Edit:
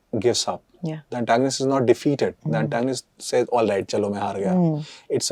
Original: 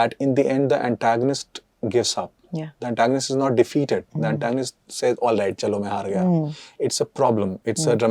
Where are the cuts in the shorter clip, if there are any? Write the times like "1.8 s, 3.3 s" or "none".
none